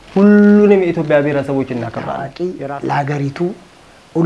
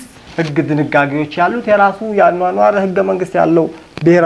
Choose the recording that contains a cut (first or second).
first